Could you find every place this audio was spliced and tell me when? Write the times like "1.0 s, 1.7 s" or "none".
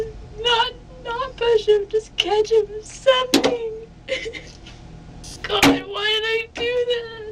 5.3 s